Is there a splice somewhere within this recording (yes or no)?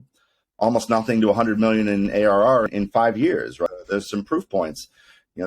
yes